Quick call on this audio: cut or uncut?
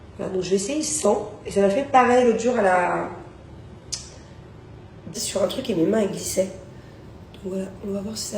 cut